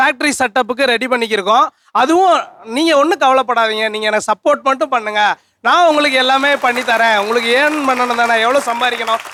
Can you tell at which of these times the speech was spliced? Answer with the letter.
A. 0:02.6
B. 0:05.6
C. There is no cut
C